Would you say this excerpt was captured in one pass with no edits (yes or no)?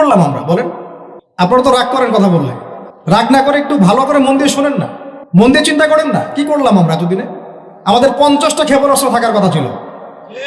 no